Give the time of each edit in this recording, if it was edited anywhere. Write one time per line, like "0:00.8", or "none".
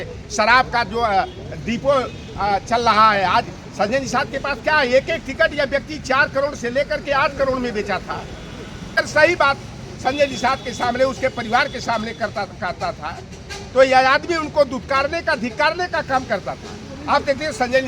0:08.9